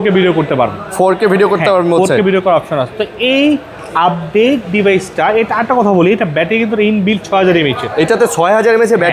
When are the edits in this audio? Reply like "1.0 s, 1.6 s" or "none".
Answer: none